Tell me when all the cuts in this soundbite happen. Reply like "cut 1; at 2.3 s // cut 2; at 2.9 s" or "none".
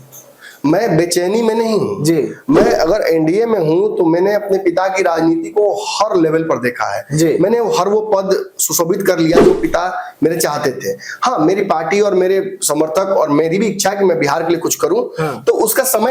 none